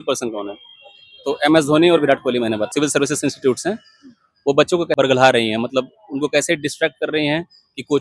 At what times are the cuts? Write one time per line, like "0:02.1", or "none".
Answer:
0:02.7
0:05.0